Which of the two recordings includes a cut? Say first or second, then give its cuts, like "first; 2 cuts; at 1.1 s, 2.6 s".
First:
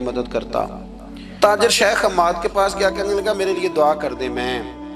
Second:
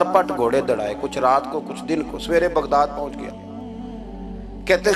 first; 1 cut; at 1.4 s